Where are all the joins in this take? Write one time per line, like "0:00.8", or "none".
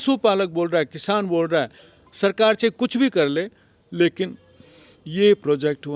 none

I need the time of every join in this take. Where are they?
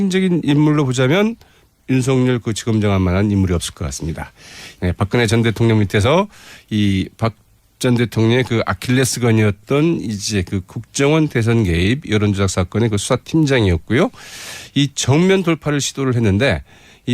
0:06.3

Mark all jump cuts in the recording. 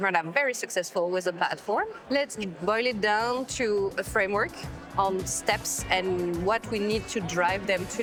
none

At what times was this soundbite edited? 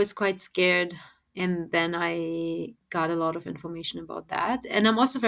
none

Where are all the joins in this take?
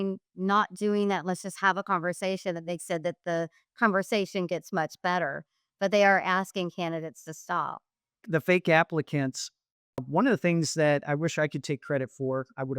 0:08.2

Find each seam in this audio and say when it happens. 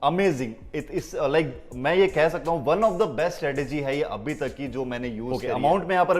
0:05.3

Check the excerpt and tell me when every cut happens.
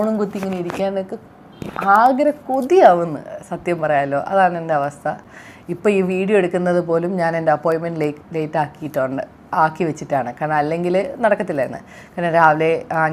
none

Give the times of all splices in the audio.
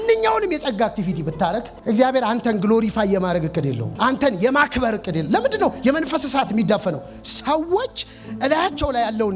0:03.9

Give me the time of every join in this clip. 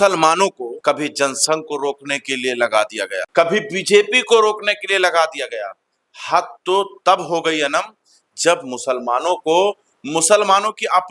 none

